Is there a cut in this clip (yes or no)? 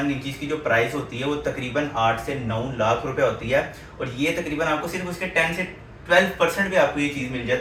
no